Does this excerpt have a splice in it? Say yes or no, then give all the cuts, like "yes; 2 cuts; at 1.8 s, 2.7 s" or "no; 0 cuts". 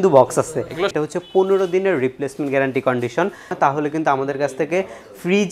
yes; 2 cuts; at 0.9 s, 3.5 s